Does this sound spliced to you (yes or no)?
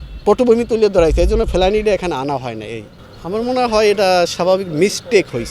no